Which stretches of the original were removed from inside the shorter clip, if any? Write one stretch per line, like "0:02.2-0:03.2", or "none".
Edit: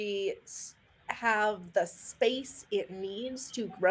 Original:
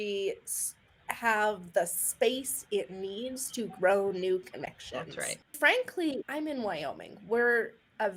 none